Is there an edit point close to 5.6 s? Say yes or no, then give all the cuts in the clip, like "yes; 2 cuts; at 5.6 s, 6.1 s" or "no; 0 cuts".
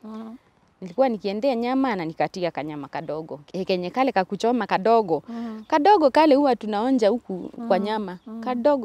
no; 1 cut; at 3.4 s